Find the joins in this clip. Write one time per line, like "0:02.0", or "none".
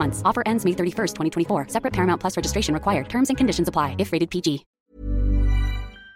0:04.7

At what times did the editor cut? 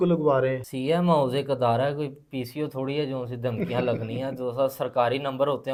none

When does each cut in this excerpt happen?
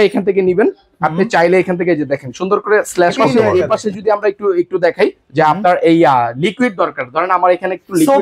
0:03.2

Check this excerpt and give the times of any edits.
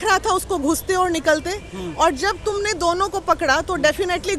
none

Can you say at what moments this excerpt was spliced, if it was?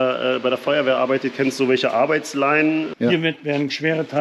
0:02.9

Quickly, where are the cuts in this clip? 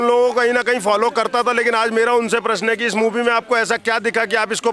none

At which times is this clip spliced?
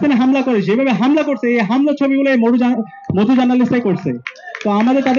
none

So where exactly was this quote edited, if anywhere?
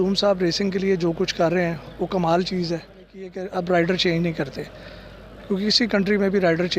0:03.4

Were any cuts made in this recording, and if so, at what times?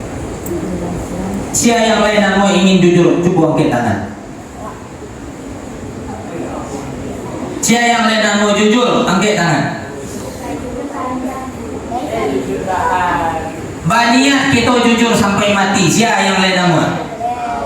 0:01.5

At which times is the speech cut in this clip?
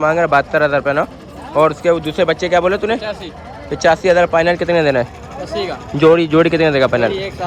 none

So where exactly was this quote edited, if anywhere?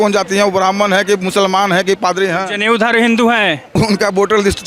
0:03.7

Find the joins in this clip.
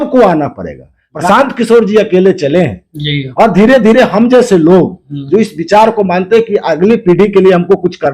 0:01.2

